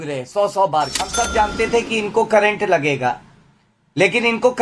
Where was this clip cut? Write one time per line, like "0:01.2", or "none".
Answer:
0:01.1